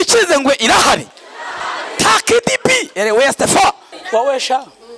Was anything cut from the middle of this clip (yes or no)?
yes